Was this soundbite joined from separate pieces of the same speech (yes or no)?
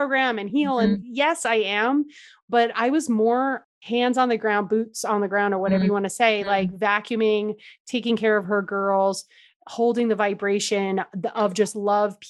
no